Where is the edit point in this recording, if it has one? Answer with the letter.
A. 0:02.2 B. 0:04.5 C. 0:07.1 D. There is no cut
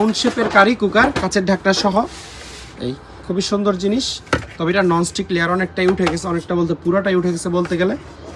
D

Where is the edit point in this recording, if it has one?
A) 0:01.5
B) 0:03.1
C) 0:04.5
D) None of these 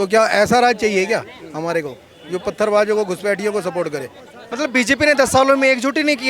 C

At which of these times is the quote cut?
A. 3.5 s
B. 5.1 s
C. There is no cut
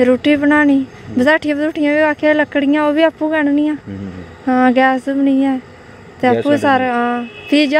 C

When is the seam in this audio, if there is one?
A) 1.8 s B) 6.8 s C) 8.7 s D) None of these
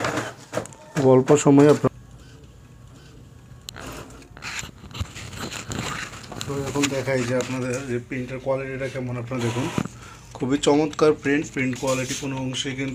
A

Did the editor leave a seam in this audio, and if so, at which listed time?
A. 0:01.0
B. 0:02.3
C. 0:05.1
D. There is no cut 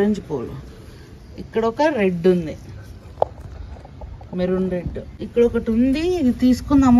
C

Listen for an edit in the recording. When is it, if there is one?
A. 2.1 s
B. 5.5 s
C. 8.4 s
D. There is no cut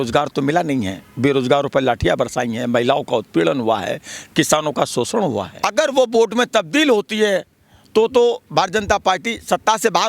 B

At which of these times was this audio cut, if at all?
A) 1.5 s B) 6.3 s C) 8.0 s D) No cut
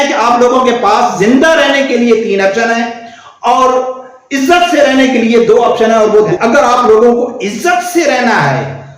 B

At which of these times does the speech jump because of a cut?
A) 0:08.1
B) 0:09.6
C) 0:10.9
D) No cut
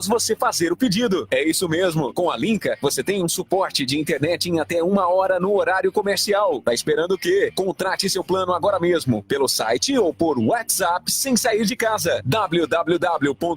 C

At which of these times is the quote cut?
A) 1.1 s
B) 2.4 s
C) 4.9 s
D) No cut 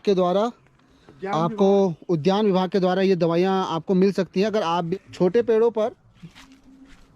C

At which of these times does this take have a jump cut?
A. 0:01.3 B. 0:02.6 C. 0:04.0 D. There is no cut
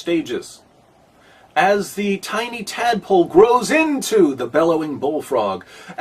C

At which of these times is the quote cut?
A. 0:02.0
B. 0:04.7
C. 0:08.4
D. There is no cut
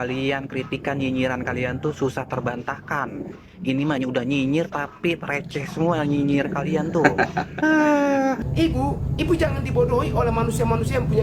C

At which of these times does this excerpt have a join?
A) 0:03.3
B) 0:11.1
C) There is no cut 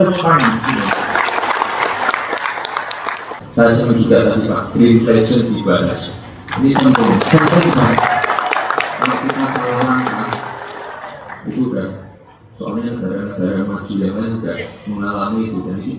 A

